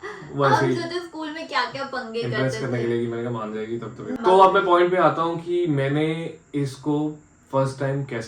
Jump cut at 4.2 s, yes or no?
yes